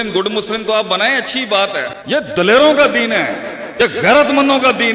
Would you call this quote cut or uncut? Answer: cut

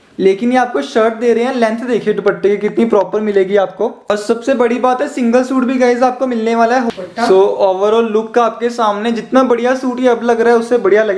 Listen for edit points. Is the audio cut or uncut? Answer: cut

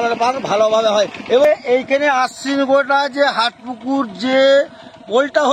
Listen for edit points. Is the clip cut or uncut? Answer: cut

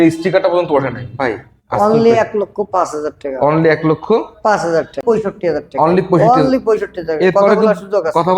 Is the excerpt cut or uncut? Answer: cut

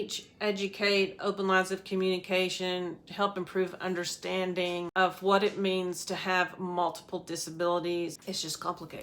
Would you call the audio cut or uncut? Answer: cut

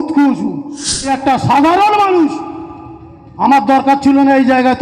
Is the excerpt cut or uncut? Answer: cut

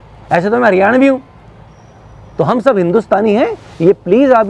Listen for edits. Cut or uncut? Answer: uncut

